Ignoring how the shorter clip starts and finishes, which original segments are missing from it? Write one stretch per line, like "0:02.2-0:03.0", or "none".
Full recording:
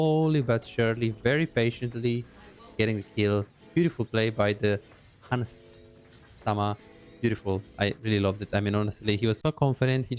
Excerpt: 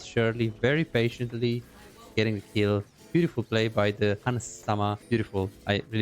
0:05.3-0:06.8